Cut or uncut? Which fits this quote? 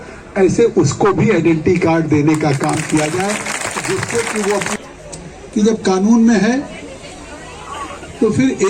cut